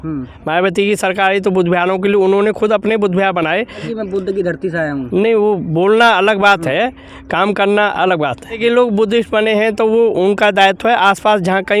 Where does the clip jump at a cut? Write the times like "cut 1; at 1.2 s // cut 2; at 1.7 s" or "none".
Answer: cut 1; at 3.8 s // cut 2; at 8.6 s